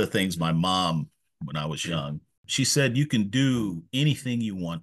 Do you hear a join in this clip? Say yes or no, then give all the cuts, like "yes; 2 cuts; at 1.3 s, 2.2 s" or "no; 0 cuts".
yes; 1 cut; at 2.4 s